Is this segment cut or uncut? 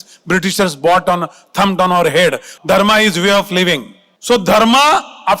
cut